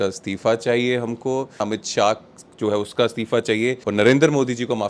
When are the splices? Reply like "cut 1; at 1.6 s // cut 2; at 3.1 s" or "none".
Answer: cut 1; at 1.6 s // cut 2; at 3.8 s